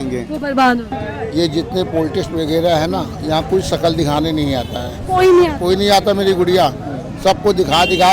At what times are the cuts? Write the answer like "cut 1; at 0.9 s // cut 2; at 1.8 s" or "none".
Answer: cut 1; at 1.0 s